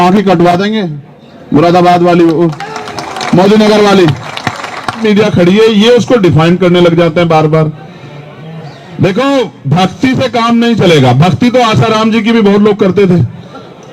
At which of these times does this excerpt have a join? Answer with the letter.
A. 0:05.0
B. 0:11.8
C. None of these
A